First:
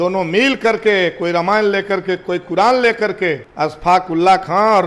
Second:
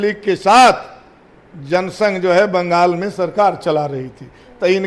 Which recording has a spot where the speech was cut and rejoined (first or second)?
first